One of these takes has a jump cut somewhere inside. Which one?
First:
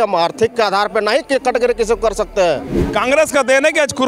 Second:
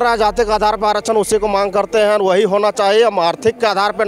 first; 1 cut; at 2.8 s

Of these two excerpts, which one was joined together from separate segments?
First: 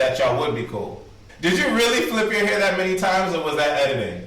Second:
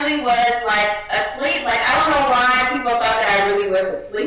first; 1 cut; at 1.2 s

